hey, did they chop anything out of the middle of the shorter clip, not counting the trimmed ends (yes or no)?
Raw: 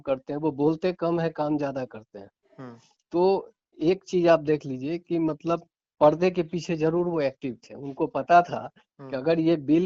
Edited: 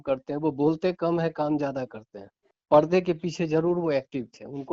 yes